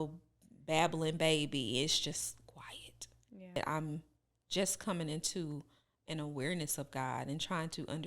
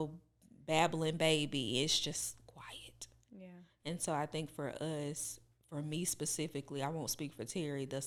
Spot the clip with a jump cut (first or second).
first